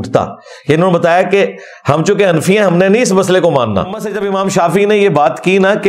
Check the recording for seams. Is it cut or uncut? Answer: cut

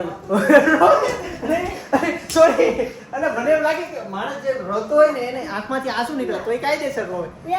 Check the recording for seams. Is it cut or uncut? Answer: uncut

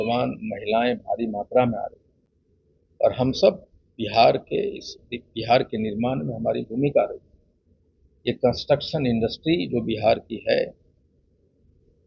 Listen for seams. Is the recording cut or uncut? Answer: uncut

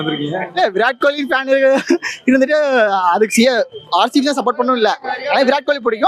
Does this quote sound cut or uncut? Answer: uncut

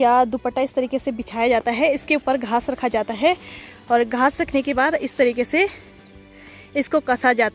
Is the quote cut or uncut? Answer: uncut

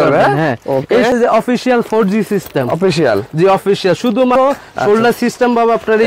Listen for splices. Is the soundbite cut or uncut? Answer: cut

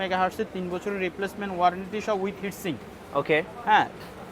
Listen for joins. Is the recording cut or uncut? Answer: uncut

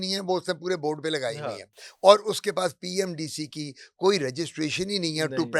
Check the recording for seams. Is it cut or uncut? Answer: uncut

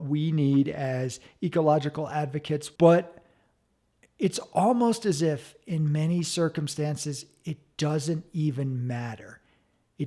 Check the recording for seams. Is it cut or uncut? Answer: cut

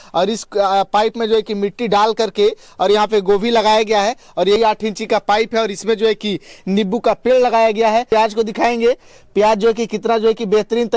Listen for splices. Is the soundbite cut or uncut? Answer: cut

